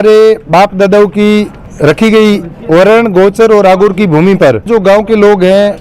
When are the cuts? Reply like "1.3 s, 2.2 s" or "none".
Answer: 1.6 s, 4.7 s